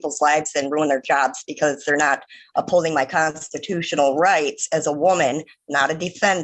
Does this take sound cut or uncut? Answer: uncut